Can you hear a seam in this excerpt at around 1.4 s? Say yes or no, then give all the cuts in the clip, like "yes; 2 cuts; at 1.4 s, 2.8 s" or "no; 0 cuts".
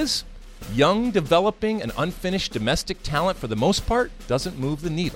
no; 1 cut; at 4.2 s